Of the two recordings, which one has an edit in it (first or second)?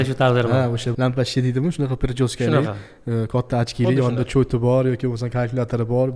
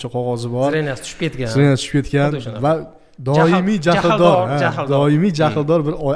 first